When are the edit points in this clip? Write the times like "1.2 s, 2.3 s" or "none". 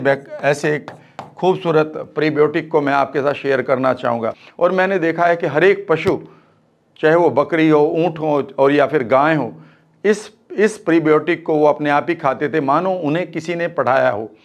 4.4 s